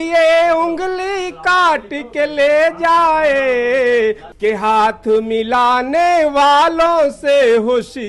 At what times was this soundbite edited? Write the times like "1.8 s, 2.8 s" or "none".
4.3 s